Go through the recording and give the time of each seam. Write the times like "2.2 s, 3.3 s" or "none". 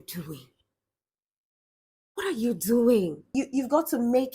3.2 s